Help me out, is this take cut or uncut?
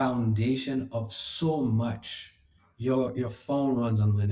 uncut